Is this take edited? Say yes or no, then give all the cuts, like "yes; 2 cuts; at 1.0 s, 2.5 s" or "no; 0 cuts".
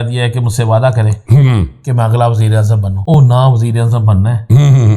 yes; 1 cut; at 3.2 s